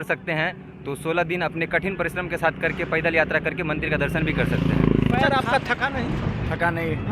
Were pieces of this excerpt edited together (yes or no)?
yes